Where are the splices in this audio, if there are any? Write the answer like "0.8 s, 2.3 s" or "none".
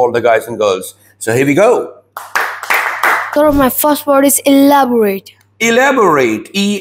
3.2 s